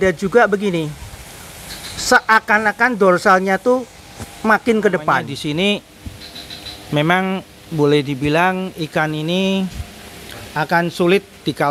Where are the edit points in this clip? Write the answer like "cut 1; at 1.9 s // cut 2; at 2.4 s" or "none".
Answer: cut 1; at 5.3 s